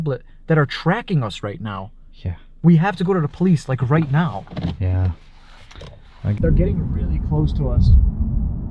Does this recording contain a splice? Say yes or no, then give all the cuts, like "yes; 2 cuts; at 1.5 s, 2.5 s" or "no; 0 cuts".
yes; 1 cut; at 6.4 s